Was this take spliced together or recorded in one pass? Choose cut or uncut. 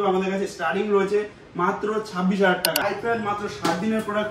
cut